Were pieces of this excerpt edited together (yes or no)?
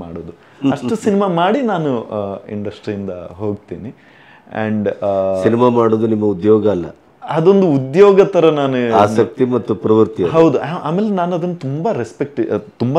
no